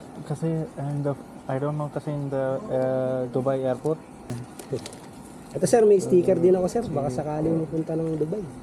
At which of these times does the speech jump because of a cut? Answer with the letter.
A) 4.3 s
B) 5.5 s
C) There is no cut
A